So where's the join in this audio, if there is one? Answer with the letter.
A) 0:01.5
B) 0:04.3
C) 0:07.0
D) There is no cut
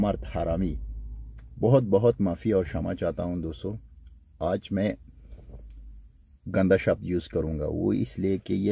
D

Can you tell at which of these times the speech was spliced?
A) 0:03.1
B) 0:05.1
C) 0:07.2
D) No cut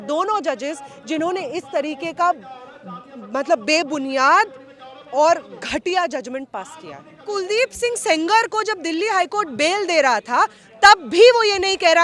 C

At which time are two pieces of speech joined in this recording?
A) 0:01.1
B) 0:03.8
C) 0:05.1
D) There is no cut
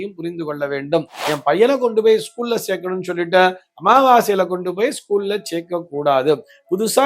A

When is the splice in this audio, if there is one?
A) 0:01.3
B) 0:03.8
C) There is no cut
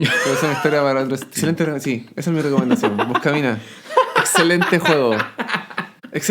A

